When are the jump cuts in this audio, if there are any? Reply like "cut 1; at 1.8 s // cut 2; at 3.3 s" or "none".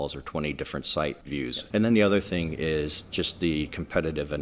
cut 1; at 1.3 s